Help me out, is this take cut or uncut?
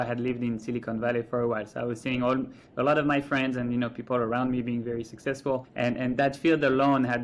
cut